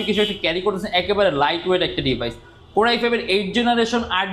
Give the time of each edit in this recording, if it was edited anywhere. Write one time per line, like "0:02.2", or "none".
none